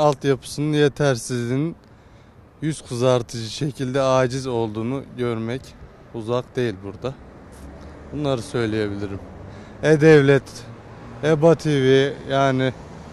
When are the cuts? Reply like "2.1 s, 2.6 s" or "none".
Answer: none